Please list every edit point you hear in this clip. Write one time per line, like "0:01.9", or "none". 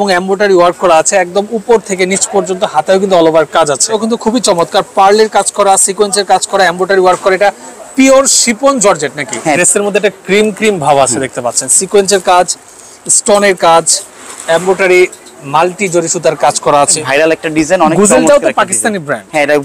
0:03.9
0:09.6
0:17.0